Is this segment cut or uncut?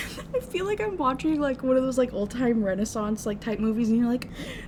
uncut